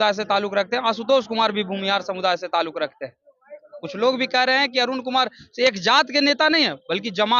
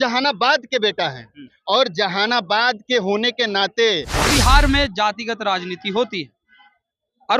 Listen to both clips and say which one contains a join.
second; 1 cut; at 4.2 s

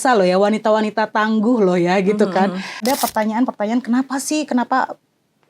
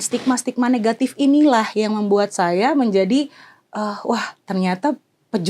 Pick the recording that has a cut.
first; 1 cut; at 2.8 s

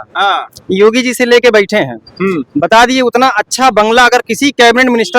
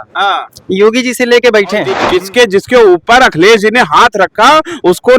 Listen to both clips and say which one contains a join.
second; 1 cut; at 2.0 s

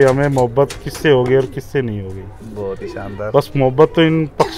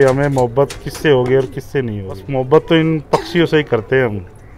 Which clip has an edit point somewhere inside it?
second; 1 cut; at 2.3 s

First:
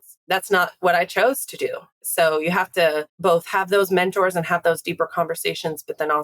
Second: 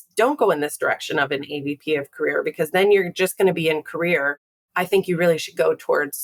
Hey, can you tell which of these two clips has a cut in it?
first; 2 cuts; at 2.0 s, 3.1 s

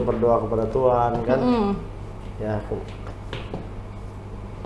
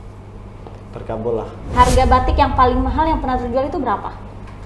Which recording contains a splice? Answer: second; 1 cut; at 1.7 s

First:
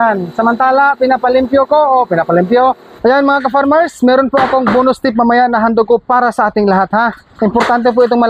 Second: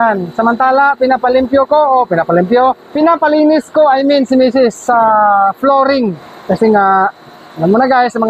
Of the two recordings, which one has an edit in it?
first; 2 cuts; at 2.8 s, 7.2 s

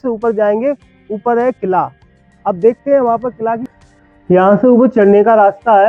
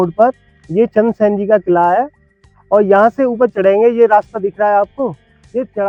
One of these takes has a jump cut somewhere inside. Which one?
first; 1 cut; at 3.7 s

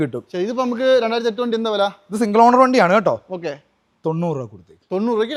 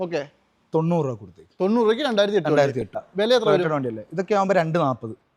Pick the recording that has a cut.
second; 1 cut; at 3.0 s

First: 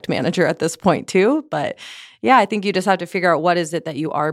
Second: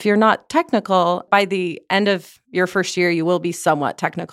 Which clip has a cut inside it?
second; 1 cut; at 1.2 s

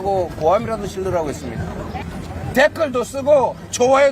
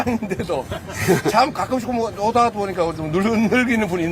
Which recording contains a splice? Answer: first; 1 cut; at 2.0 s

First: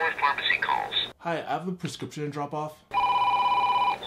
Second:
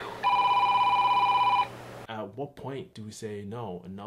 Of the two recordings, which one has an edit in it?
second; 1 cut; at 2.0 s

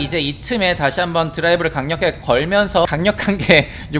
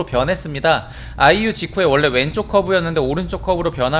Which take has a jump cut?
first; 1 cut; at 2.9 s

